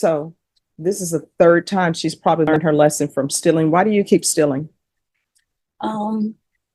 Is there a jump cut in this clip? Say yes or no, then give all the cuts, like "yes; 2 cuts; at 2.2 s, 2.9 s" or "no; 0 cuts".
yes; 1 cut; at 2.5 s